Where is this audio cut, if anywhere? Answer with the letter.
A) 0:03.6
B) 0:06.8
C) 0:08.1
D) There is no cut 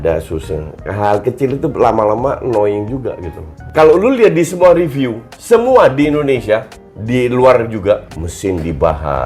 A